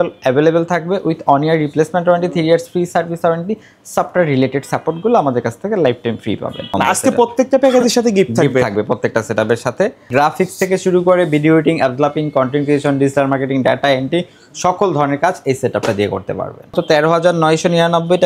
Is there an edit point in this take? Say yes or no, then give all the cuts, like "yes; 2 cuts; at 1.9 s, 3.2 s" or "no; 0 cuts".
yes; 3 cuts; at 6.7 s, 10.1 s, 16.7 s